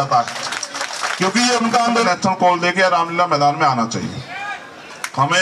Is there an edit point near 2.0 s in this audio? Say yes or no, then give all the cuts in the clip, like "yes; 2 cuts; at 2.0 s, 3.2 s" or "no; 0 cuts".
yes; 1 cut; at 2.0 s